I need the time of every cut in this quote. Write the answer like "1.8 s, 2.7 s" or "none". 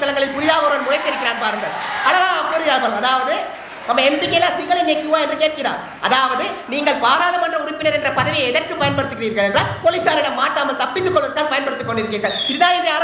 none